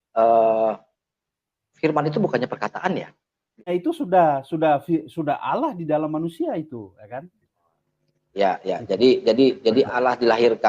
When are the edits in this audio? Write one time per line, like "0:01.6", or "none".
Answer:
0:03.7